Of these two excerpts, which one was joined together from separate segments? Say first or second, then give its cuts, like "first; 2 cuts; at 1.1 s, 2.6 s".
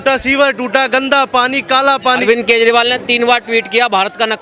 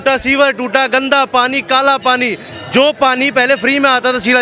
first; 1 cut; at 2.2 s